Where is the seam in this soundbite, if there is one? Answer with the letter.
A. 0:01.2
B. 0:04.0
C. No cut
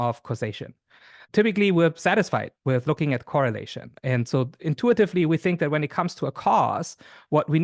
A